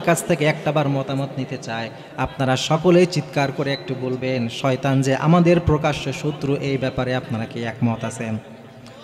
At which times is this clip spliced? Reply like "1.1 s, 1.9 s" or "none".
none